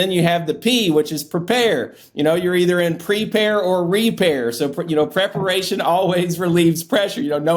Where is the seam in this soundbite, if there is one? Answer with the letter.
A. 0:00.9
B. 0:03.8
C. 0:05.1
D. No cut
D